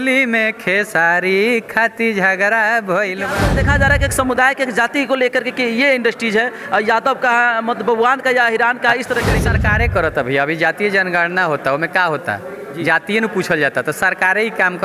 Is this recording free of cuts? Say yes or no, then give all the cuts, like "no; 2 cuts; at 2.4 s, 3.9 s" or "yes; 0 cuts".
no; 2 cuts; at 3.4 s, 9.5 s